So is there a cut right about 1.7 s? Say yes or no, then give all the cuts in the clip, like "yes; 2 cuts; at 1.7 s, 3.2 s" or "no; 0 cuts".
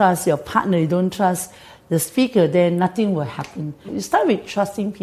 no; 1 cut; at 3.9 s